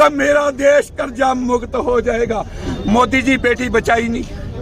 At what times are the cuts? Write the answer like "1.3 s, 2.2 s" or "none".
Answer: 2.6 s